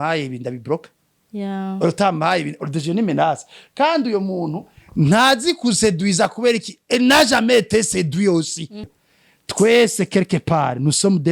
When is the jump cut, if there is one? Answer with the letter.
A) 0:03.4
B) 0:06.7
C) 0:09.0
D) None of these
C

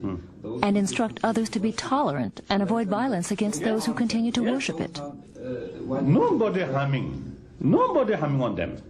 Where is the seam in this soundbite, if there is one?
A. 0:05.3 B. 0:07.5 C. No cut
B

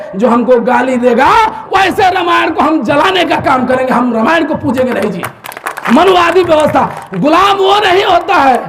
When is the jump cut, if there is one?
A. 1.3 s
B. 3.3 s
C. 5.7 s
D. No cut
C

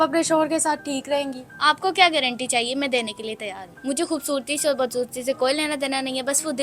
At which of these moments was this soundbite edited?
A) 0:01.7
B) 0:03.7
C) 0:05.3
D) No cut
B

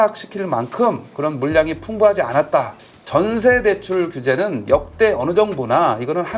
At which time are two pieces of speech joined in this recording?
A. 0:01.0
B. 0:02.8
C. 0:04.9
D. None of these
B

